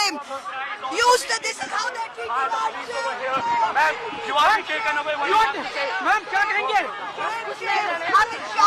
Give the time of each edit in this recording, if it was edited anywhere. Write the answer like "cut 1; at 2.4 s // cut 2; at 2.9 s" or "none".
none